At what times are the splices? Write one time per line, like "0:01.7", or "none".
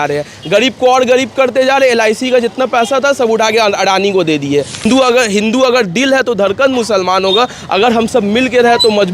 0:04.9